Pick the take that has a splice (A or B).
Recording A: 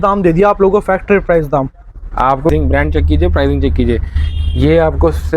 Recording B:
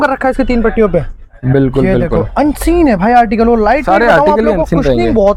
A